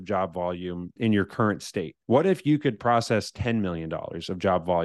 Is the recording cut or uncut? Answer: cut